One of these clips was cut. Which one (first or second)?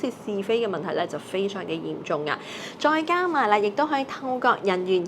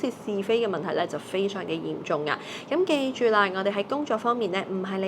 first